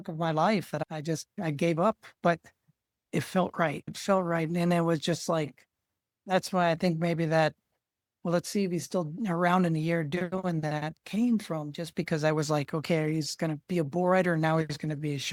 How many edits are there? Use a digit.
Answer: 0